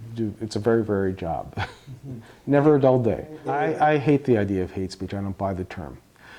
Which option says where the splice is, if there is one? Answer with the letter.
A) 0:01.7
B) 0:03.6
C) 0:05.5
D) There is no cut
B